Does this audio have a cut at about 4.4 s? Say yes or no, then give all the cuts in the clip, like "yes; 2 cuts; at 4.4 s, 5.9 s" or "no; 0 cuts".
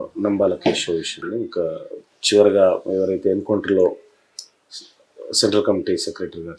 no; 1 cut; at 1.2 s